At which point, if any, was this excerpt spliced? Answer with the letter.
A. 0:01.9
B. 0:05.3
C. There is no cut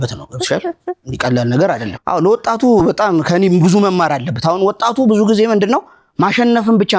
A